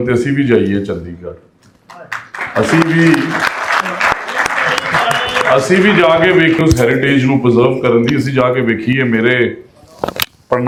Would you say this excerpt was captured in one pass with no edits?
yes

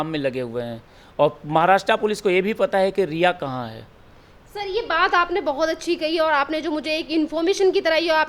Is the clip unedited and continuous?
yes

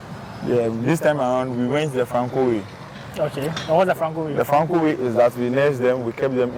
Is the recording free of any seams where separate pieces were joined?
yes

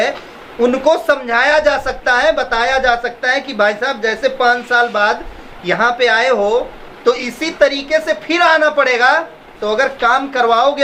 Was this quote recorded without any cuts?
yes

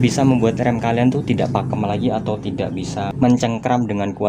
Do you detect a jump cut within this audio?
yes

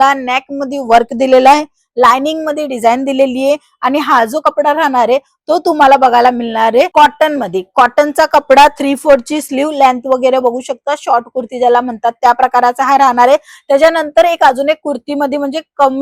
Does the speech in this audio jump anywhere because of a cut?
no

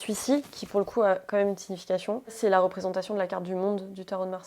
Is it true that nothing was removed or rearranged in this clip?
no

